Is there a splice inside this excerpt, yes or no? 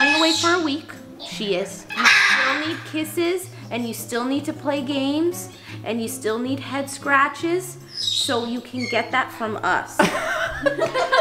no